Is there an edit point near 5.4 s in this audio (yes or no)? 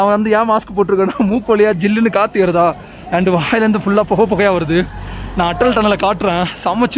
no